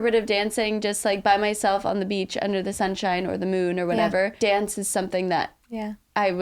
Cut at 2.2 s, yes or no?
no